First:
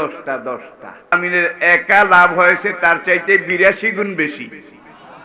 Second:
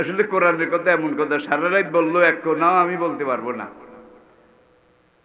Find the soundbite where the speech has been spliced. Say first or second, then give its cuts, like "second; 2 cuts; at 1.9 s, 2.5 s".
first; 1 cut; at 1.1 s